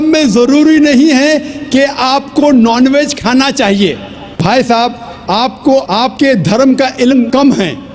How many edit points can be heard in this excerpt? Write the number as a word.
one